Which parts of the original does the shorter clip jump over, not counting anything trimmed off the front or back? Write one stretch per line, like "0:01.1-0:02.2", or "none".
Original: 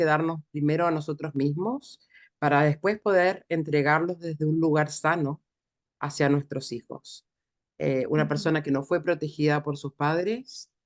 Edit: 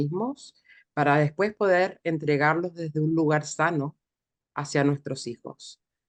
none